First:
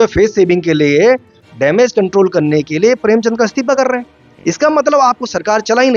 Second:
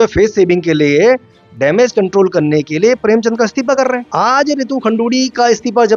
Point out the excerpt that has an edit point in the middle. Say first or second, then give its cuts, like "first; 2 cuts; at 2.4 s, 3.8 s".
second; 1 cut; at 4.1 s